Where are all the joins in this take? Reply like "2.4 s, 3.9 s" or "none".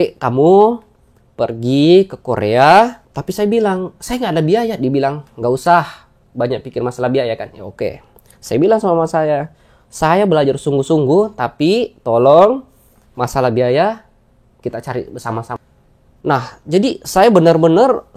3.1 s, 15.5 s